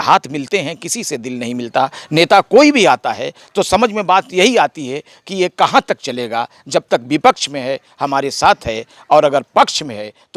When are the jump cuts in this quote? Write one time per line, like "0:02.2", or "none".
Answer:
none